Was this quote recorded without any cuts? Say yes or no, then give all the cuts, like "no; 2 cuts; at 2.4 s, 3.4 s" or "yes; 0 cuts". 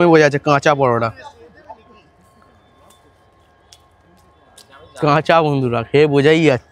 yes; 0 cuts